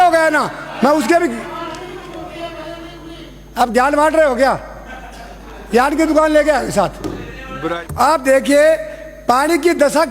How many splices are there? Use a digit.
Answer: 1